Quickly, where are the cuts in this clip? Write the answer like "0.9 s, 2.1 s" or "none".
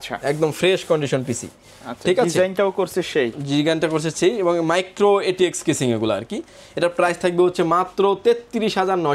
none